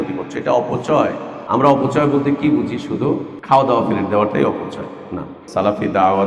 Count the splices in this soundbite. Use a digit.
3